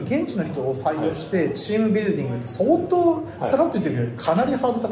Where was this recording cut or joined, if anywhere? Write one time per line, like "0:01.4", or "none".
none